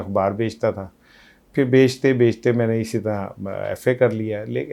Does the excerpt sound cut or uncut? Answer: uncut